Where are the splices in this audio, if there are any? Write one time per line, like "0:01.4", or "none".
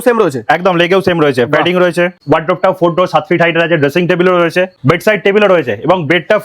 0:02.2